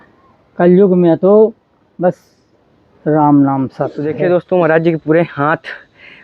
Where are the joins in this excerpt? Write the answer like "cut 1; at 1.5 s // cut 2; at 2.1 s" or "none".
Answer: cut 1; at 4.1 s